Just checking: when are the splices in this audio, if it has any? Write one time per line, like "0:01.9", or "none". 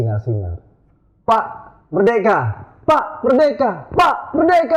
none